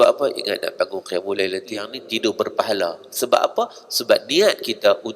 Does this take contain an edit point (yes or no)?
yes